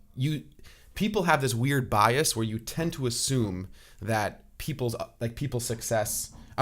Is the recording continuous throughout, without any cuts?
yes; 0 cuts

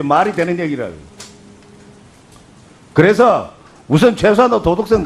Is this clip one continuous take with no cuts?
yes; 0 cuts

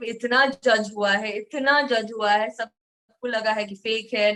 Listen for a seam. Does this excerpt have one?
no; 0 cuts

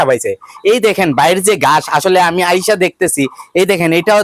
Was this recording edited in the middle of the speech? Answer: no; 0 cuts

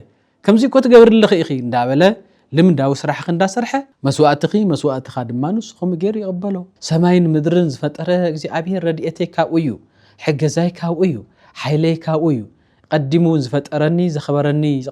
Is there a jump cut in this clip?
yes; 2 cuts; at 3.9 s, 6.7 s

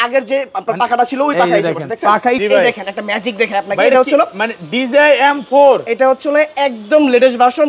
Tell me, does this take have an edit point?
yes; 1 cut; at 2.4 s

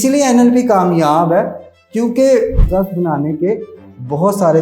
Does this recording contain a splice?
yes; 1 cut; at 2.6 s

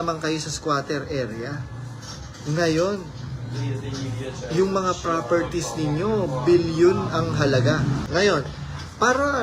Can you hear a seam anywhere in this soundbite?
yes; 1 cut; at 8.0 s

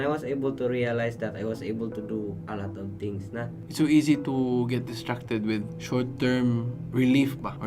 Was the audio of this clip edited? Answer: yes; 1 cut; at 3.6 s

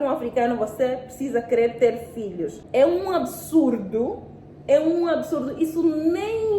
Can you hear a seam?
yes; 1 cut; at 2.5 s

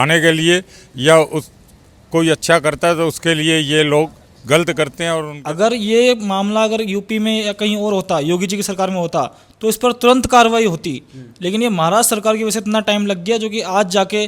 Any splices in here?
yes; 1 cut; at 5.3 s

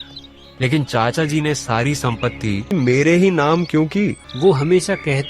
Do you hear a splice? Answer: yes; 2 cuts; at 2.7 s, 4.2 s

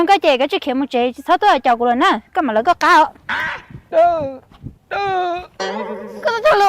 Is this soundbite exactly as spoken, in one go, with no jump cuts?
no; 1 cut; at 5.7 s

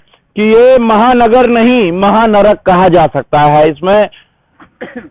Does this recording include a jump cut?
no; 0 cuts

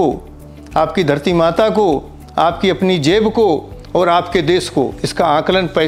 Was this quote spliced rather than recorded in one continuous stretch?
no; 0 cuts

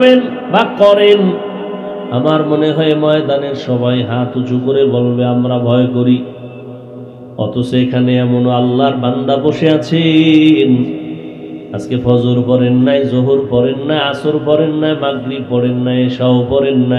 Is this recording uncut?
yes; 0 cuts

